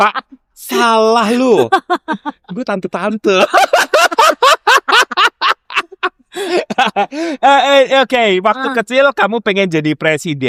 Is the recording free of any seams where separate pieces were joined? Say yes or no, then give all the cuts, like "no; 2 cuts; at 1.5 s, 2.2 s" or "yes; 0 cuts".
yes; 0 cuts